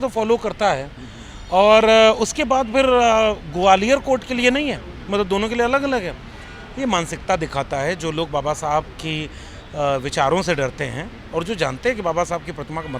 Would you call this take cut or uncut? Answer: uncut